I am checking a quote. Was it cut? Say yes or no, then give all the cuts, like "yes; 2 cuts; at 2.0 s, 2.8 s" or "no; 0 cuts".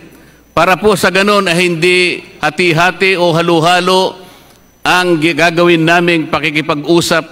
no; 0 cuts